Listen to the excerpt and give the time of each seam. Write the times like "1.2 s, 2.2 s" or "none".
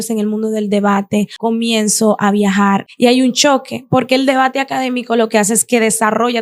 1.3 s, 2.8 s

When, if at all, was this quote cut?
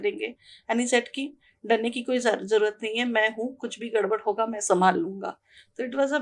none

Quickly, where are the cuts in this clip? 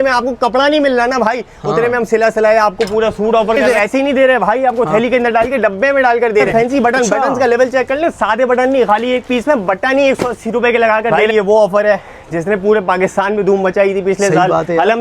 3.6 s, 6.5 s, 11.2 s

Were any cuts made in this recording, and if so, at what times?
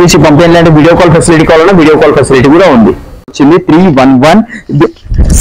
3.5 s

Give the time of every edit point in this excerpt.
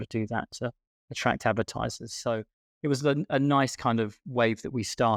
none

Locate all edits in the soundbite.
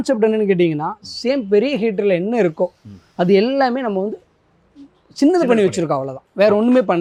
none

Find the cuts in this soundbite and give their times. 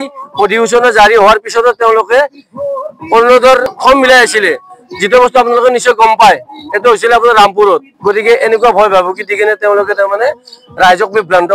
3.7 s, 7.9 s

